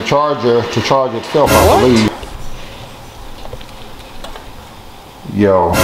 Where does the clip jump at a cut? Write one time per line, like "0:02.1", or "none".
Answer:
0:02.1